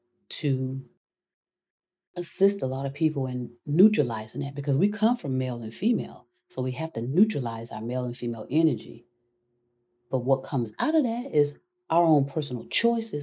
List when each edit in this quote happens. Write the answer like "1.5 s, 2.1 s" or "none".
none